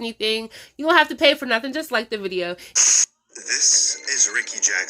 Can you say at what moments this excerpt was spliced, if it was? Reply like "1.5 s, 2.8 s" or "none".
2.7 s